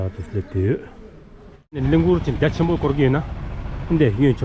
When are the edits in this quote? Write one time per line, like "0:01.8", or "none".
0:01.8